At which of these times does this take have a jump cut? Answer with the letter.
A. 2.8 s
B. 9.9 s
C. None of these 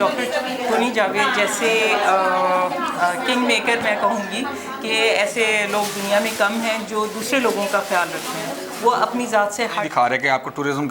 B